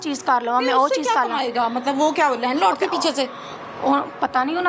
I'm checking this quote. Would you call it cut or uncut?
uncut